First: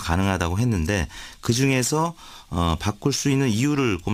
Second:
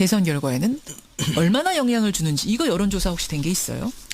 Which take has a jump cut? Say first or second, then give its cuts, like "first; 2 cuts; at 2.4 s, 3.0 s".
second; 1 cut; at 0.9 s